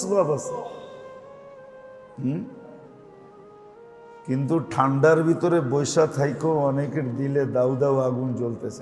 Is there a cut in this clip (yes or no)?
yes